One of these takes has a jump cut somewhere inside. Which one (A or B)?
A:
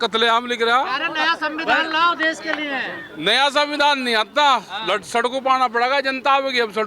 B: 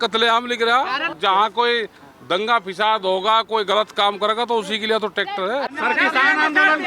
B